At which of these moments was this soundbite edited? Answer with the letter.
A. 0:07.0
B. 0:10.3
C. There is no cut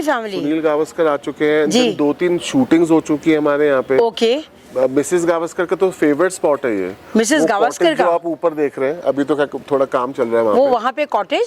C